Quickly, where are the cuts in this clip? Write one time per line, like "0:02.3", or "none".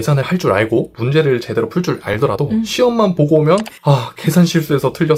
none